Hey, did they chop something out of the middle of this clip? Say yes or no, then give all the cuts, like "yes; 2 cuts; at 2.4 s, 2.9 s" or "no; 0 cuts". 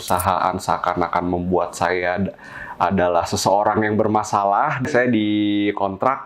yes; 1 cut; at 4.8 s